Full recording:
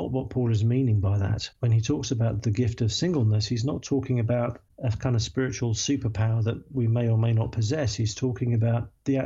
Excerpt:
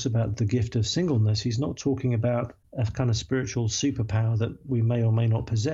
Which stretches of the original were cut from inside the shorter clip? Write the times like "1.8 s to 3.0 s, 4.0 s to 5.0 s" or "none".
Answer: none